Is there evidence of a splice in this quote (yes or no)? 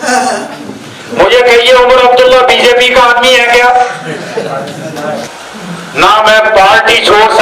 yes